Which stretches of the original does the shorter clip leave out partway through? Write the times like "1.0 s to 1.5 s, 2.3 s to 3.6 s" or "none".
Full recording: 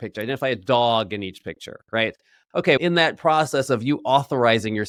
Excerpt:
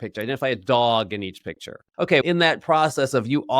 1.7 s to 2.3 s